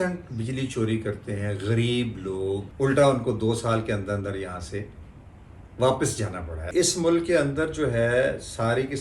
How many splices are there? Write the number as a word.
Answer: two